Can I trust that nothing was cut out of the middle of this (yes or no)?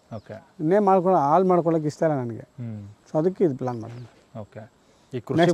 yes